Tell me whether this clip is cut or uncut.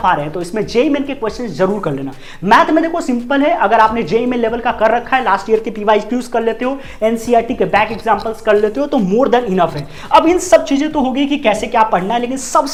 uncut